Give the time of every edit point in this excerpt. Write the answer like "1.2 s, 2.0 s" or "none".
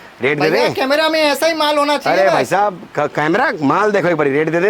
none

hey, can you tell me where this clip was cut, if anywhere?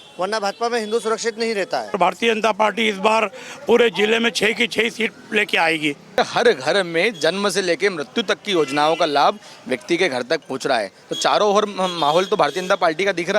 2.0 s, 6.2 s

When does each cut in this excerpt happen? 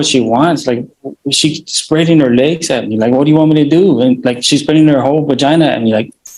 none

